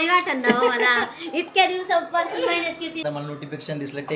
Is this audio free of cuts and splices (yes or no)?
no